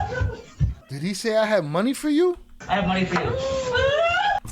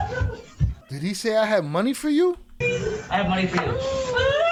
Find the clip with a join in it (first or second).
first